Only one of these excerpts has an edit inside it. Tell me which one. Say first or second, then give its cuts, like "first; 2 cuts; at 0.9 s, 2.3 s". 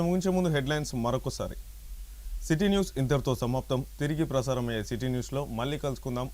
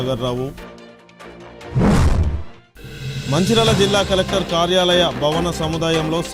first; 1 cut; at 2.0 s